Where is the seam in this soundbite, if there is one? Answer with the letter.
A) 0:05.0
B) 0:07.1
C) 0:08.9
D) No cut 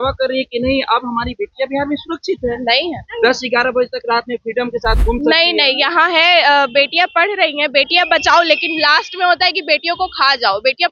D